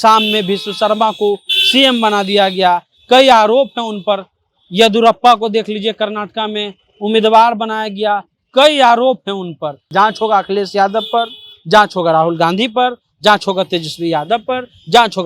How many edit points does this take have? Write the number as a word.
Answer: one